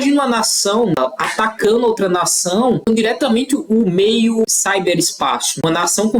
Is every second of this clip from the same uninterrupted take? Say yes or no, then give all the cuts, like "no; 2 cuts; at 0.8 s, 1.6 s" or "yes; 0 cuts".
no; 2 cuts; at 0.9 s, 2.9 s